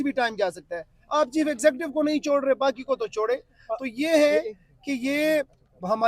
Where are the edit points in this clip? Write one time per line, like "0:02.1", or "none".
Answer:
none

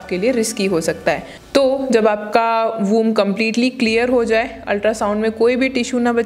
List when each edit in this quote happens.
none

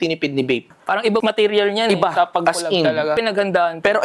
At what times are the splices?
0:03.1

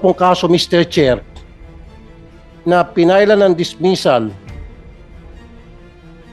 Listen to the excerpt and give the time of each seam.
0:01.2
0:02.6

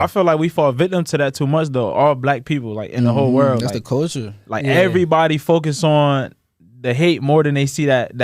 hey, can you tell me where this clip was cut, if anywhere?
none

